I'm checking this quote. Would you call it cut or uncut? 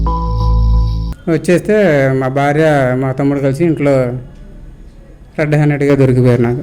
cut